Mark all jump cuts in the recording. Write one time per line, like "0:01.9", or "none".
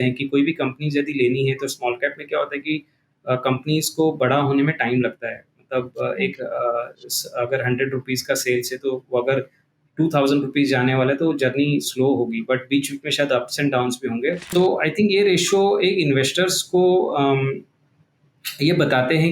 0:14.4